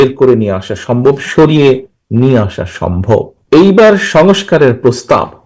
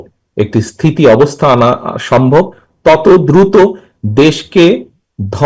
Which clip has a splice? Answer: first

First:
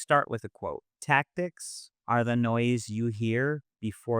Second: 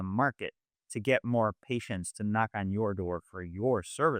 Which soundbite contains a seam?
first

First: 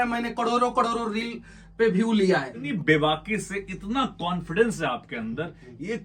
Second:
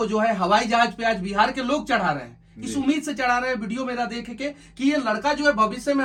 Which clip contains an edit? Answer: first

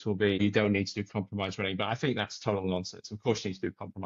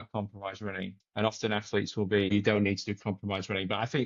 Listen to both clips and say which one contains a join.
second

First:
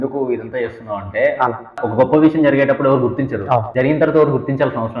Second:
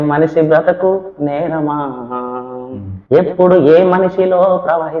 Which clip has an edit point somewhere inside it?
first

